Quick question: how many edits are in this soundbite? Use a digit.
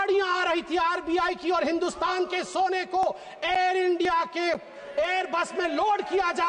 0